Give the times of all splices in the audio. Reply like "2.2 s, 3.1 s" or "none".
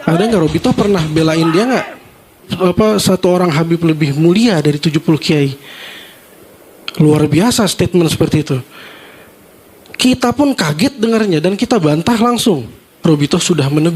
2.5 s, 12.9 s